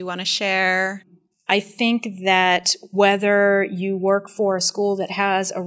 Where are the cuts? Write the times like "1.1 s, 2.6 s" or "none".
1.3 s